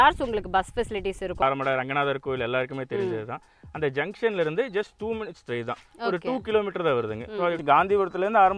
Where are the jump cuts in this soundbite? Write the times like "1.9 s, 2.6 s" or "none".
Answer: 1.4 s, 7.6 s